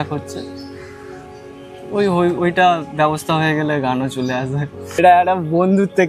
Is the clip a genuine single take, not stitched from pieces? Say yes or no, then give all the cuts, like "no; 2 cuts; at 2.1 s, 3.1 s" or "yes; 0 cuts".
no; 1 cut; at 4.9 s